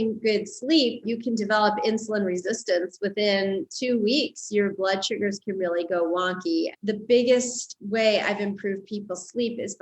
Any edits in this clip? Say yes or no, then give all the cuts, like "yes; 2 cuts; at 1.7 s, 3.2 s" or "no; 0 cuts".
yes; 2 cuts; at 1.0 s, 6.7 s